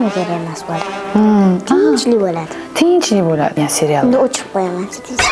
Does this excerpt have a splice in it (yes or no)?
yes